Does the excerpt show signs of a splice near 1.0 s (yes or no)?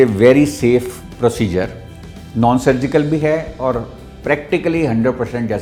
no